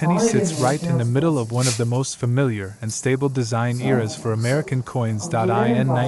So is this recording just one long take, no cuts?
yes; 0 cuts

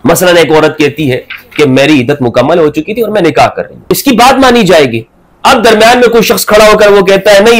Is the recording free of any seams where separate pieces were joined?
no; 1 cut; at 3.8 s

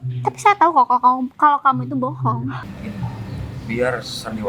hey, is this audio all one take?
no; 1 cut; at 2.7 s

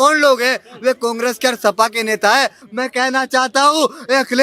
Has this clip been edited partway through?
yes; 1 cut; at 2.7 s

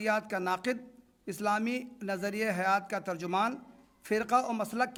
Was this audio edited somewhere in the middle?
no; 0 cuts

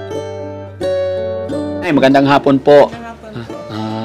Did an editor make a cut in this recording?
yes; 1 cut; at 1.9 s

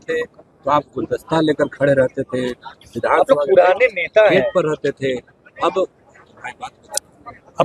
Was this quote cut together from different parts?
no; 0 cuts

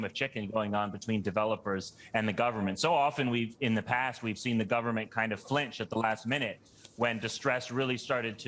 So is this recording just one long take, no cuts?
yes; 0 cuts

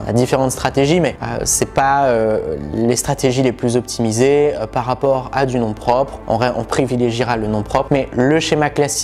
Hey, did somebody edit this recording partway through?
no; 0 cuts

